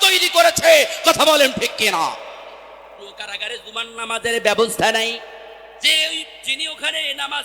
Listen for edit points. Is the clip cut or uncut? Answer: cut